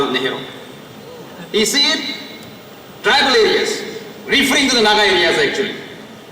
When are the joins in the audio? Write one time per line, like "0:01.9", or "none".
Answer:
none